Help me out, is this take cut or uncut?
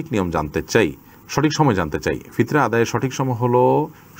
uncut